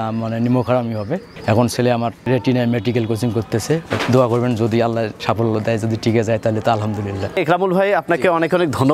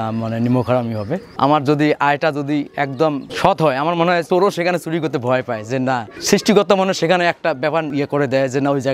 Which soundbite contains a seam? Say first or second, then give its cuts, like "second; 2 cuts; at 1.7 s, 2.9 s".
second; 5 cuts; at 1.3 s, 3.3 s, 4.2 s, 6.1 s, 7.9 s